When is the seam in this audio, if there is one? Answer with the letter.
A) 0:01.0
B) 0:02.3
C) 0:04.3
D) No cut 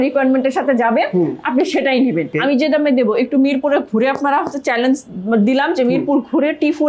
B